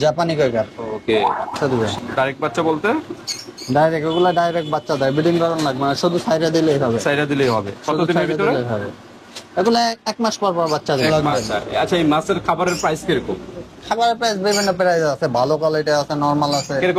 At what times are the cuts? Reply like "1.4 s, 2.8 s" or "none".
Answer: 1.7 s, 11.2 s